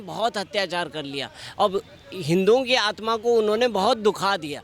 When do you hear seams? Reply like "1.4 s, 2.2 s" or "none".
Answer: none